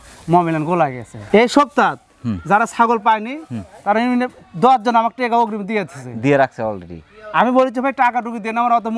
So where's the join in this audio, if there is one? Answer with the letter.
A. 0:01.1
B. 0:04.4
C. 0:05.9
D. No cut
A